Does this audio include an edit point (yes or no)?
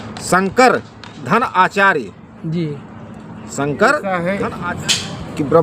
yes